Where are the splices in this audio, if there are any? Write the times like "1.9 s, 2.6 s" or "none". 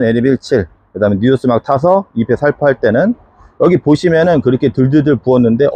none